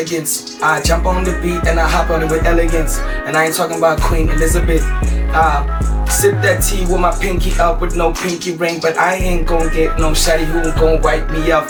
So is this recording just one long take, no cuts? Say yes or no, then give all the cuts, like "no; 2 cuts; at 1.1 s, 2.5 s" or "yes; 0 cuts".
yes; 0 cuts